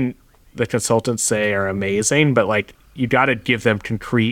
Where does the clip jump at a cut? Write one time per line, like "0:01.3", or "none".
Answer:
none